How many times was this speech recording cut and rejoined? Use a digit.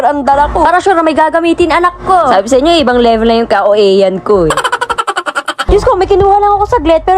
1